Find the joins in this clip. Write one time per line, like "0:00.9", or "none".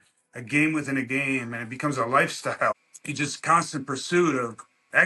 0:02.9